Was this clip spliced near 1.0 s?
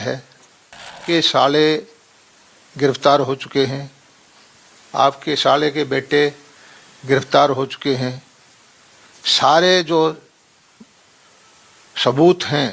yes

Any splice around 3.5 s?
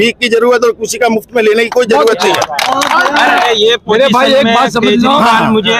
yes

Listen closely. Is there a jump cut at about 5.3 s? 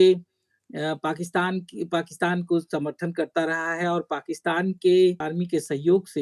yes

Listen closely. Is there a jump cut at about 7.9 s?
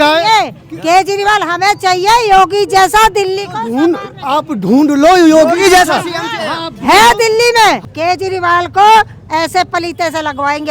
yes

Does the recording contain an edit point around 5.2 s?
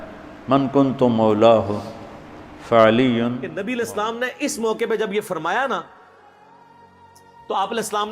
no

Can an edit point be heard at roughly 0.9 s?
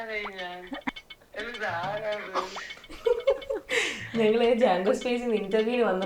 yes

